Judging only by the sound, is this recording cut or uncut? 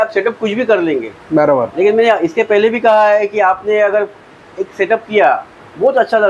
uncut